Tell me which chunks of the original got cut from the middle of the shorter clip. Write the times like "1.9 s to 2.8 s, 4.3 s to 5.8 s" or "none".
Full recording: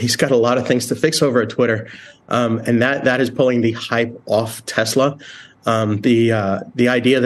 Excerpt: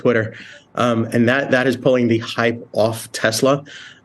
none